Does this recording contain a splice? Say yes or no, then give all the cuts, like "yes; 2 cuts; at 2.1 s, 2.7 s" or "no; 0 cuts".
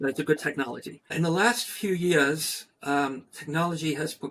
yes; 1 cut; at 1.1 s